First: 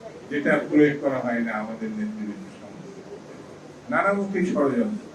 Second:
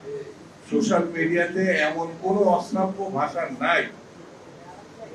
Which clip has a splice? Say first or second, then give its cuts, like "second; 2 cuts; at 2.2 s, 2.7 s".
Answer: first; 1 cut; at 3.7 s